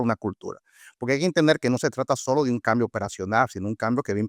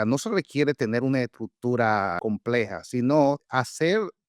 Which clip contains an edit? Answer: second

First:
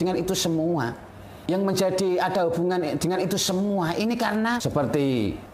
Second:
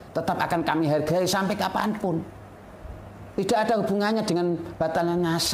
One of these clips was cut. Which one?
first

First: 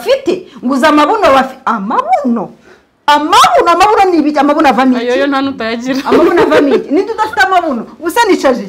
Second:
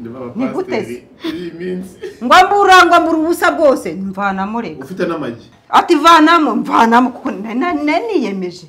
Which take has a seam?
second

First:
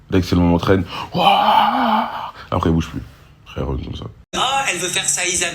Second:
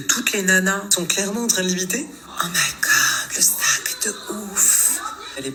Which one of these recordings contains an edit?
first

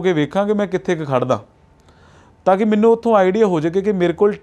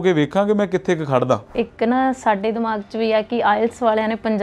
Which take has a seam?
second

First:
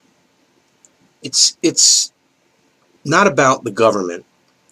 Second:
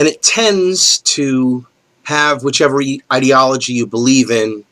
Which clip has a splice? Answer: first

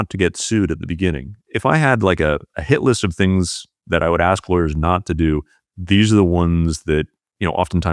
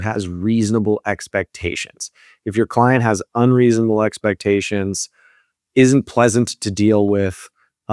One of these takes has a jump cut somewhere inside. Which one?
first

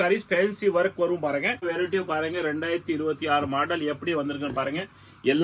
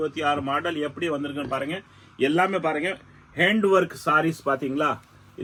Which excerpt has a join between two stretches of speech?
first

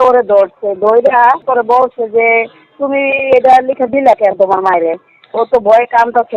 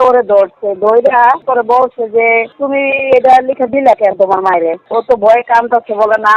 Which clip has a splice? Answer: second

